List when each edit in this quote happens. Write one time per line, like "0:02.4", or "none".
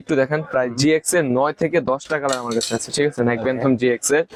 none